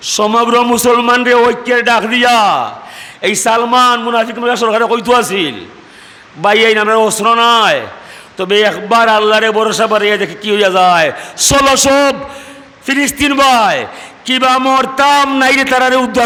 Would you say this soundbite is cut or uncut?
uncut